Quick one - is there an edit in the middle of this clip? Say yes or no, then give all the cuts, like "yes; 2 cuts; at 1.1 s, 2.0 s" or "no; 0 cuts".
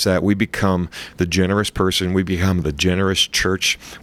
no; 0 cuts